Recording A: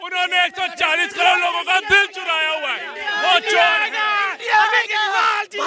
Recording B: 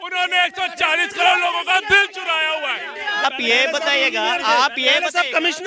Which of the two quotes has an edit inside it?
B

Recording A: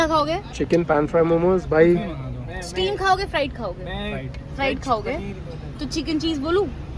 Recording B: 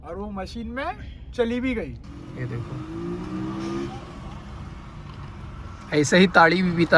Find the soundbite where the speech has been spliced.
B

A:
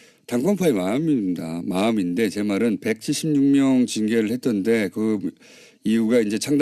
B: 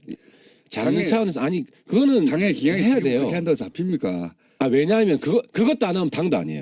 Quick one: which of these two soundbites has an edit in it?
A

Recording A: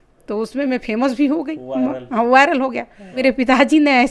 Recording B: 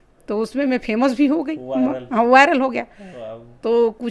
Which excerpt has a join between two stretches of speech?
A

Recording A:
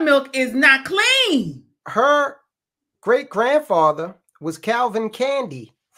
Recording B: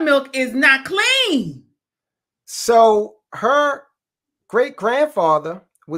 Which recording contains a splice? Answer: A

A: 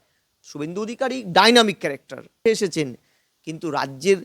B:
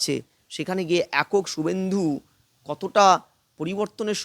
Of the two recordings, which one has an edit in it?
A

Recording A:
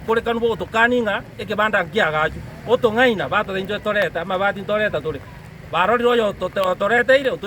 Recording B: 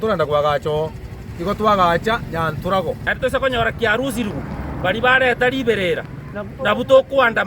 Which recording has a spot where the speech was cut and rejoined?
B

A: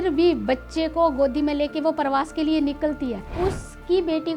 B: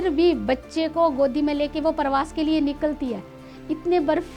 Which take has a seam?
A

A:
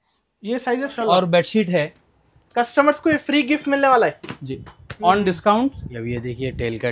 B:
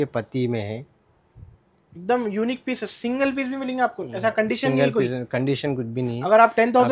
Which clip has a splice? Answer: A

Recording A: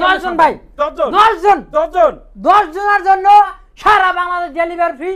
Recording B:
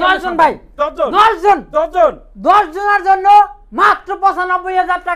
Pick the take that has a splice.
A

